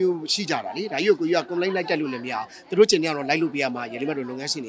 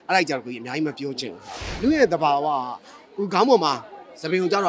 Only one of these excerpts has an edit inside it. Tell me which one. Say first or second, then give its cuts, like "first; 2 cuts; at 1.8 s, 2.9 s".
second; 1 cut; at 1.6 s